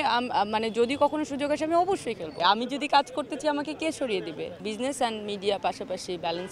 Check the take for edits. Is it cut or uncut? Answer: cut